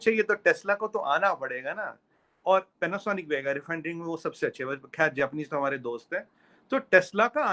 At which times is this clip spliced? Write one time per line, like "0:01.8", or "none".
none